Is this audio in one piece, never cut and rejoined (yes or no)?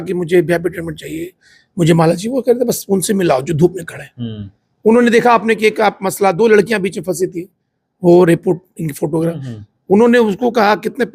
yes